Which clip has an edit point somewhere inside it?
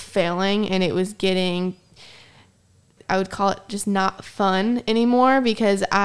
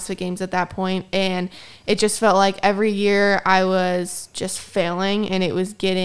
first; 1 cut; at 2.9 s

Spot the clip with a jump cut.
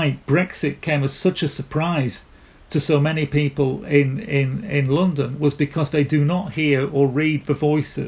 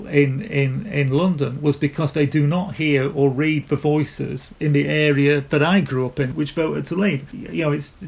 second; 1 cut; at 6.3 s

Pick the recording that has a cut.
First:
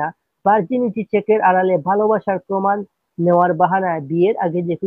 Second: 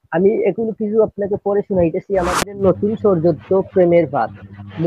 second; 1 cut; at 2.6 s

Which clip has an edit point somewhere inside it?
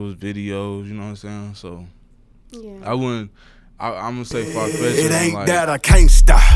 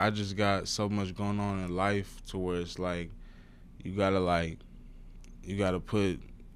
first; 1 cut; at 4.9 s

